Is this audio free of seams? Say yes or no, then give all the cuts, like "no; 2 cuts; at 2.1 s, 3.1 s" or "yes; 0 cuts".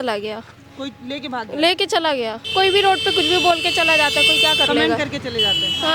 no; 1 cut; at 2.5 s